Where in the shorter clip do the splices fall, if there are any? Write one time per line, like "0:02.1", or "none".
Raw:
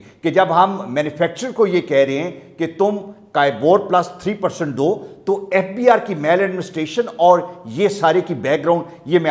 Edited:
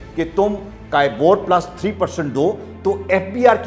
none